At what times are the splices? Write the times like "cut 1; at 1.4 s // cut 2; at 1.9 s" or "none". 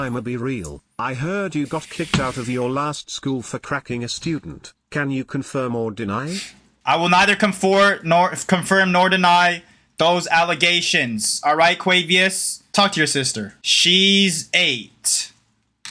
none